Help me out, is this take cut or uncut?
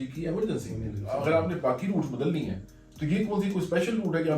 cut